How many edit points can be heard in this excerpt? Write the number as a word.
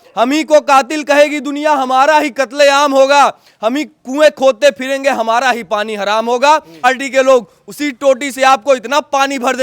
one